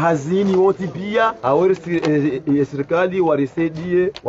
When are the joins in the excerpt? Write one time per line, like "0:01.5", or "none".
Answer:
none